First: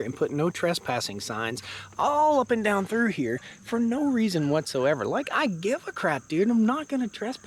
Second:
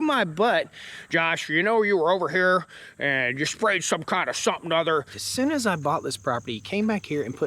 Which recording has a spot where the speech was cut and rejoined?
second; 1 cut; at 5.2 s

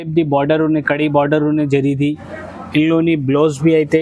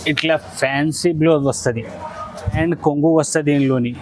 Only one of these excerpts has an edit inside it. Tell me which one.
second; 1 cut; at 2.6 s

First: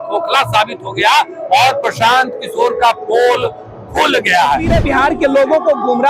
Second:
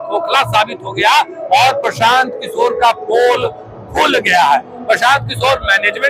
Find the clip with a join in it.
first; 1 cut; at 4.7 s

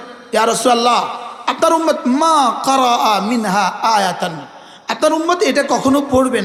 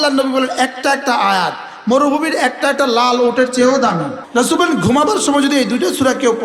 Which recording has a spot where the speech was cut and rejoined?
second; 1 cut; at 4.2 s

